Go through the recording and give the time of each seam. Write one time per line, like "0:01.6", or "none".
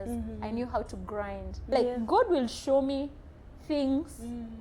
0:01.6